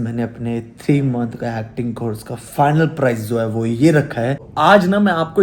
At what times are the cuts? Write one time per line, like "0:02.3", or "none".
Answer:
0:04.4